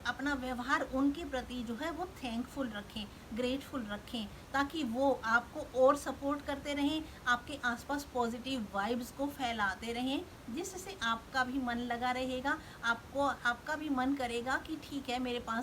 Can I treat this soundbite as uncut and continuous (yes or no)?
yes